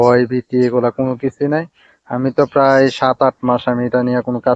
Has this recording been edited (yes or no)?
no